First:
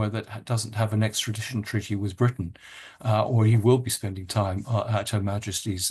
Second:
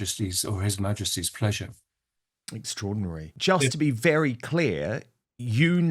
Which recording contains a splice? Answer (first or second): second